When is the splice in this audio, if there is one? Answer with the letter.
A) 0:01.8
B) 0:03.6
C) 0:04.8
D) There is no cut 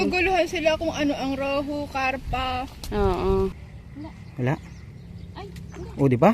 B